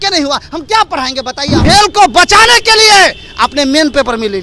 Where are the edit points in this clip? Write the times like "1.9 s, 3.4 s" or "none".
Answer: 1.6 s